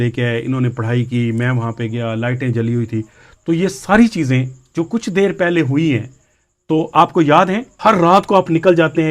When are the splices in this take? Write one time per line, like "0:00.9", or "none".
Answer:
0:07.7